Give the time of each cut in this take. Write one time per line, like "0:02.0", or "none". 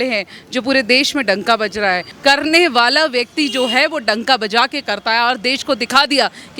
0:02.1